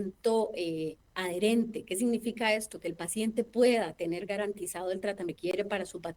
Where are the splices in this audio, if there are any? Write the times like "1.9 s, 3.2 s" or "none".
1.1 s, 5.3 s